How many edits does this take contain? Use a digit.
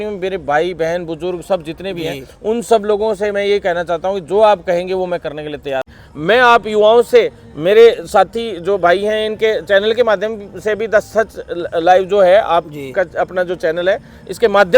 1